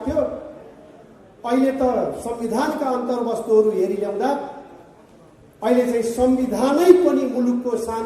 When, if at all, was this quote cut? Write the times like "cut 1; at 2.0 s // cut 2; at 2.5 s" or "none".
none